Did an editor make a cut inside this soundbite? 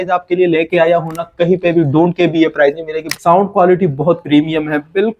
yes; 1 cut; at 3.1 s

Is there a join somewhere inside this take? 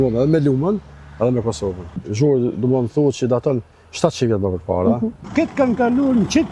yes; 2 cuts; at 2.1 s, 5.2 s

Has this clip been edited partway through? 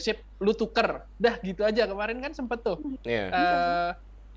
no; 0 cuts

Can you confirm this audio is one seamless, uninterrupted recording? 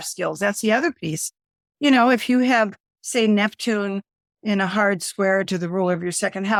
yes; 0 cuts

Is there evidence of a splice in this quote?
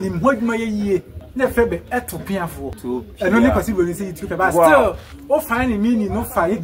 yes; 2 cuts; at 1.2 s, 2.7 s

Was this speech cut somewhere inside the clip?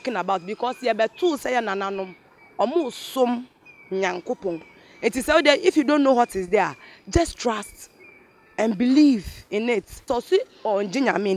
yes; 1 cut; at 10.1 s

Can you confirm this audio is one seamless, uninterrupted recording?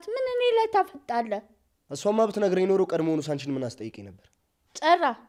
yes; 0 cuts

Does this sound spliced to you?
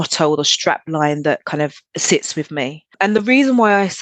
yes; 2 cuts; at 1.8 s, 2.9 s

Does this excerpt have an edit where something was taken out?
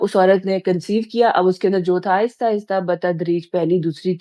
no; 0 cuts

